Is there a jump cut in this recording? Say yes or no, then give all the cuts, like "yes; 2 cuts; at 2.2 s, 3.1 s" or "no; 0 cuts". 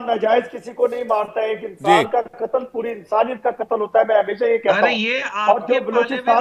no; 0 cuts